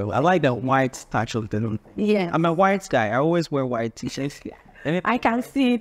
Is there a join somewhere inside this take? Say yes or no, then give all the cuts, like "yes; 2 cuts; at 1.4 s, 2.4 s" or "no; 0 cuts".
no; 0 cuts